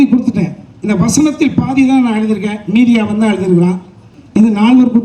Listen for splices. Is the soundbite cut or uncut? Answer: cut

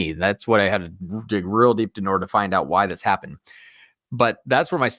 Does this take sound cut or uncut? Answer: uncut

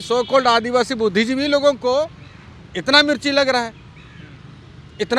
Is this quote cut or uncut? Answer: uncut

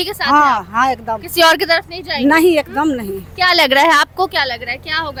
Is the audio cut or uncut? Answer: uncut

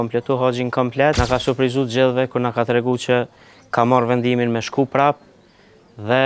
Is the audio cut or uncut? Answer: cut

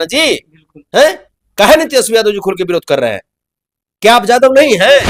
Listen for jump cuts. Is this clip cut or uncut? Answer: uncut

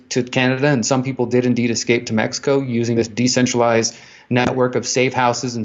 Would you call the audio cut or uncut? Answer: uncut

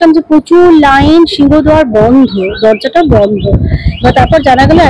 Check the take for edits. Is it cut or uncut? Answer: uncut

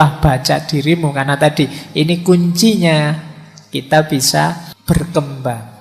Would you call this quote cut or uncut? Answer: cut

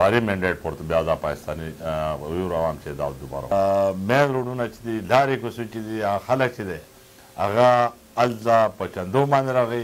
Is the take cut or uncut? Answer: cut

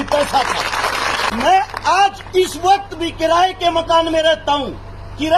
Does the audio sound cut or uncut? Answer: cut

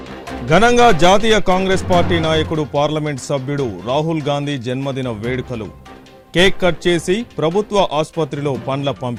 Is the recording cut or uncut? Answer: uncut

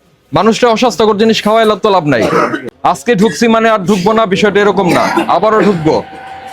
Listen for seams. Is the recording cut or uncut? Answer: cut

